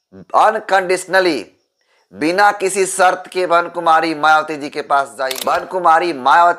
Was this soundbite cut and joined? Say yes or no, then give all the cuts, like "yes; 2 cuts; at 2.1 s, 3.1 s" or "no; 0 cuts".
yes; 1 cut; at 5.2 s